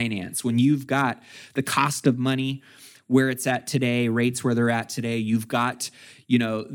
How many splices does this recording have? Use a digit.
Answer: 0